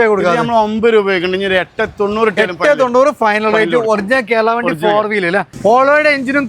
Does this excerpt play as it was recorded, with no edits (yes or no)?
no